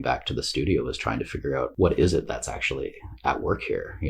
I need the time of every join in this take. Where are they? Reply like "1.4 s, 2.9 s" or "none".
1.7 s

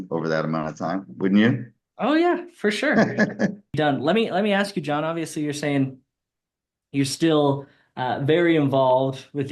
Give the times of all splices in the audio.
3.8 s

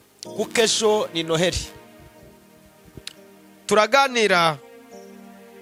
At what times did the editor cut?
none

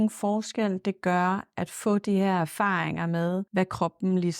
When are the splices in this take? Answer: 3.5 s

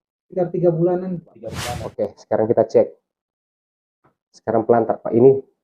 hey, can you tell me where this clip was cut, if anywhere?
1.5 s

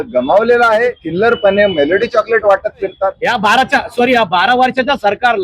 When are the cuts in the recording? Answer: 1.0 s, 3.2 s

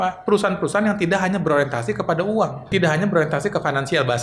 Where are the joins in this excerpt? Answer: 2.7 s

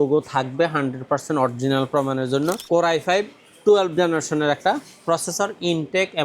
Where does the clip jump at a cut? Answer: 2.6 s

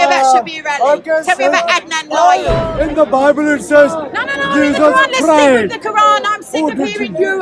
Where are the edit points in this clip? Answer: 2.6 s

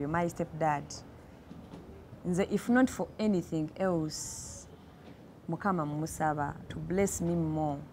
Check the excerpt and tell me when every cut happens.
none

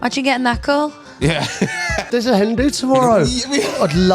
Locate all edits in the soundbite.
2.1 s

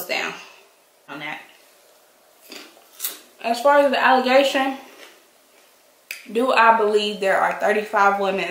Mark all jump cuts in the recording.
1.1 s

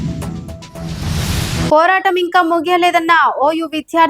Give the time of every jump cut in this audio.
1.7 s

